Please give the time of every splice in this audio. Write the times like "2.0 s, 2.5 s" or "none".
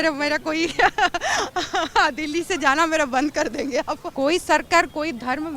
4.1 s